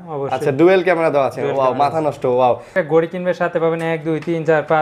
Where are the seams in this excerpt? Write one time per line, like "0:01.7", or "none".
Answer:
0:02.7